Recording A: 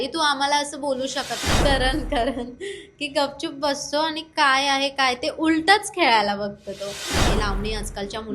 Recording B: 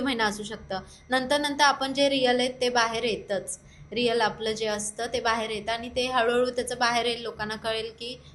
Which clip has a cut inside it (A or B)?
A